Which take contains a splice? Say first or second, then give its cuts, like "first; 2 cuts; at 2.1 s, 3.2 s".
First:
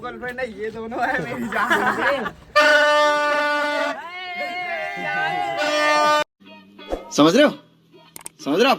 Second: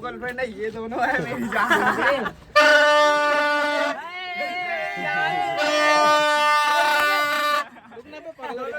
second; 1 cut; at 6.3 s